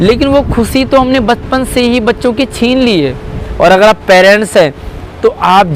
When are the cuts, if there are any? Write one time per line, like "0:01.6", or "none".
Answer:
0:03.4